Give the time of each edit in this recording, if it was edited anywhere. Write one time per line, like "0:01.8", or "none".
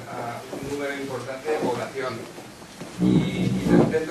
none